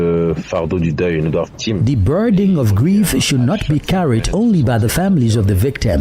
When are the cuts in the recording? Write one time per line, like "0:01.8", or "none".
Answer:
0:01.5